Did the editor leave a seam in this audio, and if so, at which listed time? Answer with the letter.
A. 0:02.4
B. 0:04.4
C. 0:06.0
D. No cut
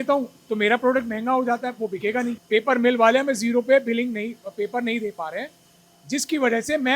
A